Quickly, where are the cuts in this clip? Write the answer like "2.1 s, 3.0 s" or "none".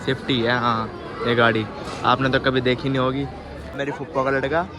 3.7 s